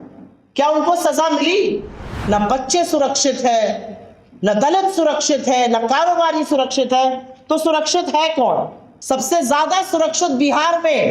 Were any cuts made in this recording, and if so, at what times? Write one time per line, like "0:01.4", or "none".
0:02.1